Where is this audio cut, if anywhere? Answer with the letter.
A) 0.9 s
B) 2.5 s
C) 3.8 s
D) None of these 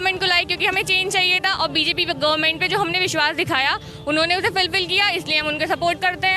D